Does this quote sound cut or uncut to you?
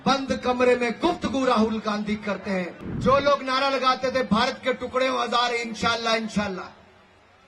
cut